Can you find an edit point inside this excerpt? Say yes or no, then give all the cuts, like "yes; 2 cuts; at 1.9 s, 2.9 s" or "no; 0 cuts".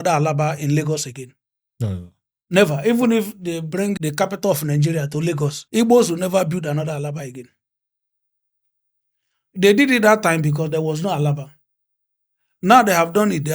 yes; 2 cuts; at 4.0 s, 5.6 s